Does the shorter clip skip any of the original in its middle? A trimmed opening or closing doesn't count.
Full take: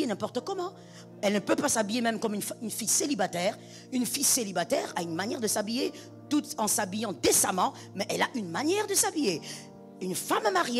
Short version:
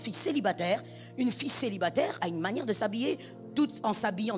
no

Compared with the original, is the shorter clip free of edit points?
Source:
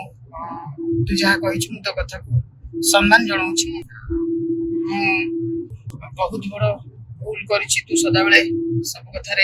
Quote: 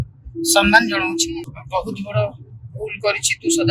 no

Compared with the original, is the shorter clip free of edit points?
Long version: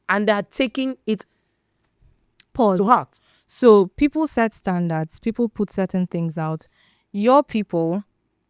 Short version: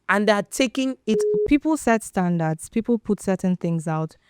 no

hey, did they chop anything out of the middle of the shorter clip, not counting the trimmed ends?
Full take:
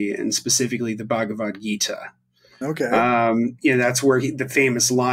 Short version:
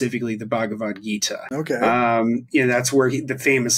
yes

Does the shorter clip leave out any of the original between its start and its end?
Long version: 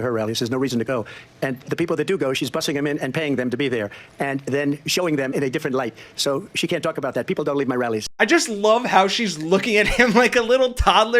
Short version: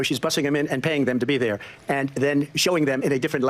no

